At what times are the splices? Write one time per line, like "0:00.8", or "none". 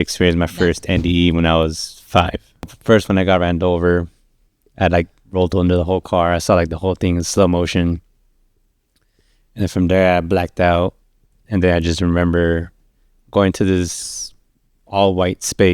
0:02.8